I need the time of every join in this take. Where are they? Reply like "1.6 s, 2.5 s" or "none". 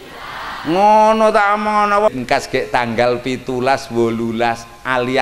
2.1 s